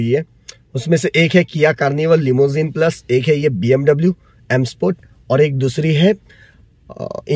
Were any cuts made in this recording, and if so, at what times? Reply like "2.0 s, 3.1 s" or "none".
none